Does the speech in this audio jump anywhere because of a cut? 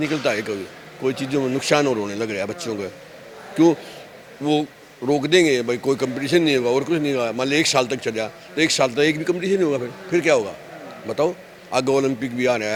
no; 0 cuts

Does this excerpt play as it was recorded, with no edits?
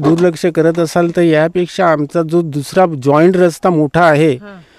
yes; 0 cuts

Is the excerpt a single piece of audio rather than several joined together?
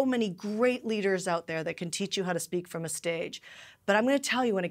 yes; 0 cuts

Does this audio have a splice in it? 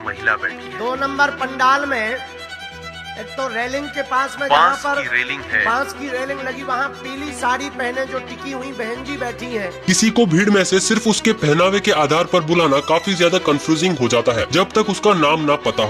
no; 0 cuts

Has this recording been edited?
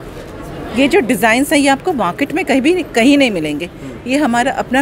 no; 0 cuts

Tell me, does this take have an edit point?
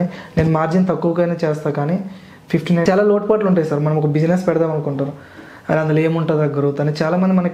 yes; 1 cut; at 2.9 s

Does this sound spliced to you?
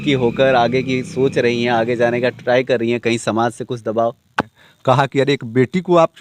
yes; 1 cut; at 4.6 s

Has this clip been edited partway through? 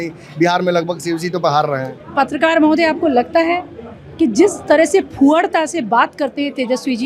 no; 0 cuts

